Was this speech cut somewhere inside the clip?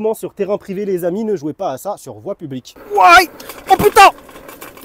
yes; 1 cut; at 2.8 s

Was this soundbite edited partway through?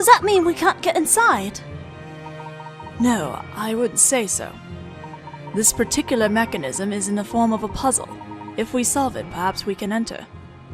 no; 0 cuts

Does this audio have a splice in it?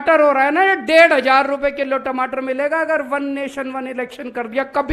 no; 0 cuts

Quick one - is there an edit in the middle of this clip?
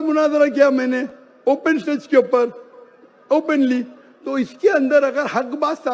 no; 0 cuts

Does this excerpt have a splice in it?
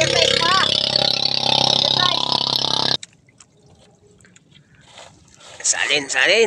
yes; 1 cut; at 2.9 s

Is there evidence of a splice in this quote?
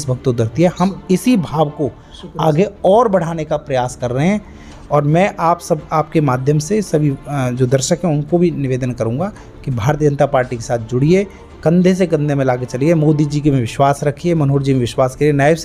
no; 0 cuts

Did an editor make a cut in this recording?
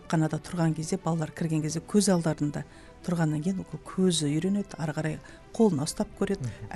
no; 0 cuts

